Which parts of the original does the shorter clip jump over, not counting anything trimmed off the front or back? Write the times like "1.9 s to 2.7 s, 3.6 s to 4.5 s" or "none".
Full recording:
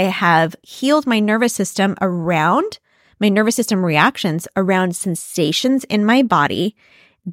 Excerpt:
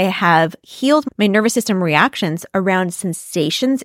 1.0 s to 3.1 s